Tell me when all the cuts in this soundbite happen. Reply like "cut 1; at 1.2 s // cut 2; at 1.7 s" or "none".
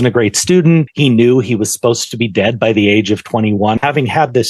cut 1; at 0.9 s // cut 2; at 3.8 s